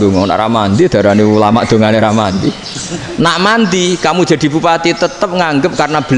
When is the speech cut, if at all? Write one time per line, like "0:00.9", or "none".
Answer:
none